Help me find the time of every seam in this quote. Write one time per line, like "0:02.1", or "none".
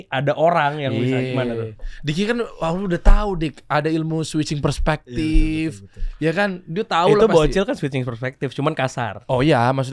none